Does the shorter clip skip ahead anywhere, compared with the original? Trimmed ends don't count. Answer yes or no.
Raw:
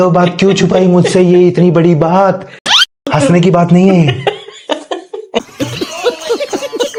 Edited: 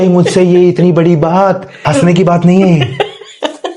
yes